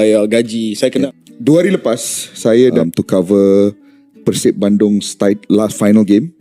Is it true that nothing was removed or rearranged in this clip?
no; 2 cuts; at 1.1 s, 2.8 s

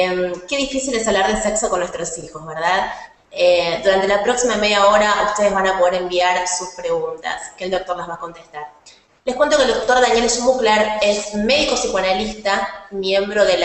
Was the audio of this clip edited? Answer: no; 0 cuts

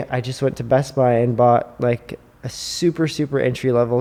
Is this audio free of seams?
yes; 0 cuts

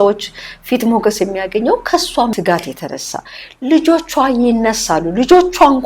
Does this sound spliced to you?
yes; 1 cut; at 2.3 s

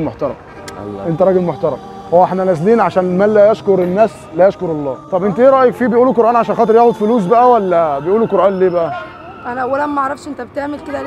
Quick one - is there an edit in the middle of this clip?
yes; 1 cut; at 4.9 s

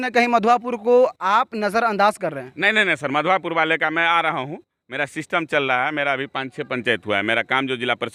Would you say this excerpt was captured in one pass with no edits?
yes; 0 cuts

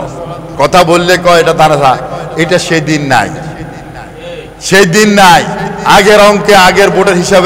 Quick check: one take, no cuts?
yes; 0 cuts

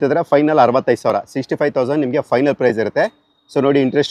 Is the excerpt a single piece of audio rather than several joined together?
yes; 0 cuts

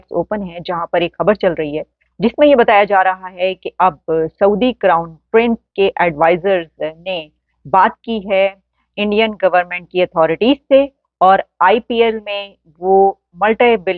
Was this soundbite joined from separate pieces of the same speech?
no; 0 cuts

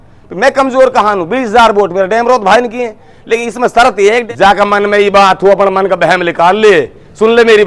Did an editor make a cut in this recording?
yes; 1 cut; at 4.3 s

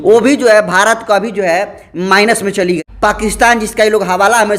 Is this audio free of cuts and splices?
no; 1 cut; at 2.8 s

